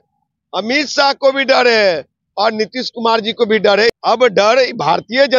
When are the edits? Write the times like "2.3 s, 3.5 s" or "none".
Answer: 4.0 s